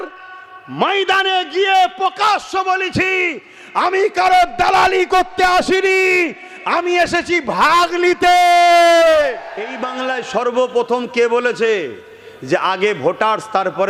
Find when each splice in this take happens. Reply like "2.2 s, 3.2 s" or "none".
9.8 s